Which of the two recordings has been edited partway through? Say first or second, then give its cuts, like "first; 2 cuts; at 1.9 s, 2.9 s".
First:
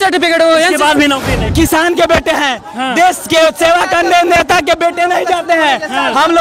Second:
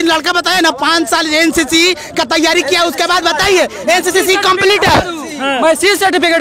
first; 1 cut; at 1.5 s